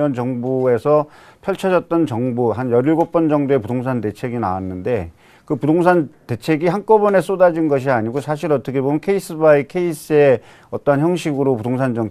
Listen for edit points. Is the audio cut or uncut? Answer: cut